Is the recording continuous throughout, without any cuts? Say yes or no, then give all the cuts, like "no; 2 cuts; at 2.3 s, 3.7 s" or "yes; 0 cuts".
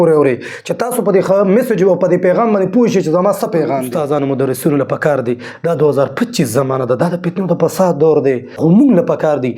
no; 2 cuts; at 3.8 s, 8.5 s